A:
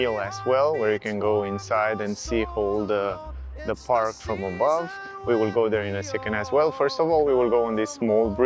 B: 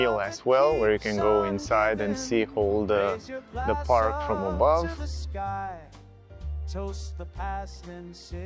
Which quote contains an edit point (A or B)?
B